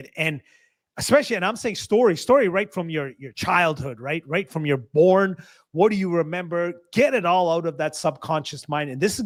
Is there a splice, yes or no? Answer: no